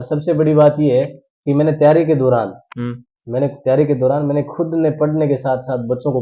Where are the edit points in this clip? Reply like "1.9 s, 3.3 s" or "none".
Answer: none